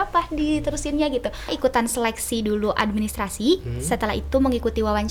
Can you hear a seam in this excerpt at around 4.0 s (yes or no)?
no